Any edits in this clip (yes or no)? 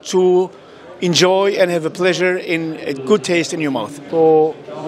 yes